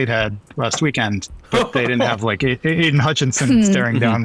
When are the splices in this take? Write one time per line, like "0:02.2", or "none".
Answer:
0:01.3